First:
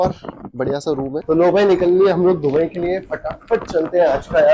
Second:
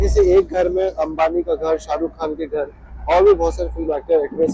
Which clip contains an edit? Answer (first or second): first